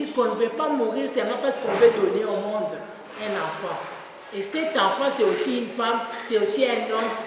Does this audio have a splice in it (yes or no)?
no